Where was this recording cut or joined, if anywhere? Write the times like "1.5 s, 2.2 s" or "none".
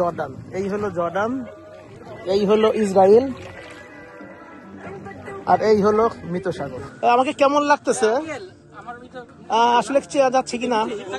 6.8 s

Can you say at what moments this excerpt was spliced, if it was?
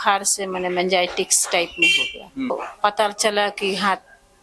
2.5 s

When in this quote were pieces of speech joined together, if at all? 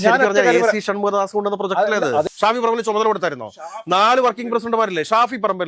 2.2 s

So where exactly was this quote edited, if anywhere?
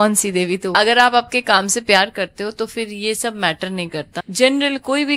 0.8 s, 4.2 s

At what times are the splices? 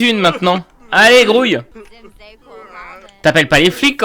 none

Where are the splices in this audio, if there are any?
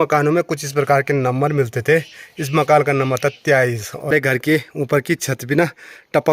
4.1 s

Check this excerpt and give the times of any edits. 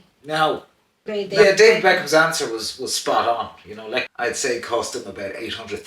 1.2 s, 4.1 s

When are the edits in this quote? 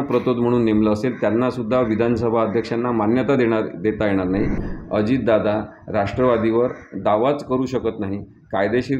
4.7 s

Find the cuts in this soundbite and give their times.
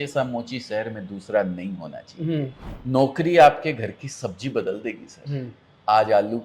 2.7 s

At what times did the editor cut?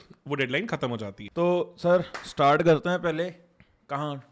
1.2 s

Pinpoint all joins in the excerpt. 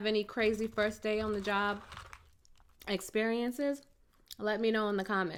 none

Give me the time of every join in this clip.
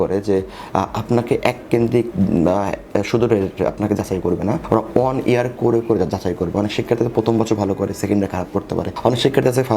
4.6 s, 8.9 s

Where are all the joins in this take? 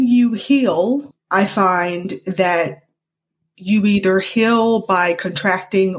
1.1 s

